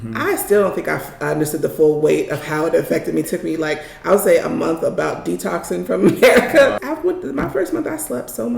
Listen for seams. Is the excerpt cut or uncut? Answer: cut